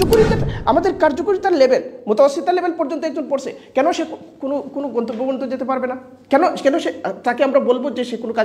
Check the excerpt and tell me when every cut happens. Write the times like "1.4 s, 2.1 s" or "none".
none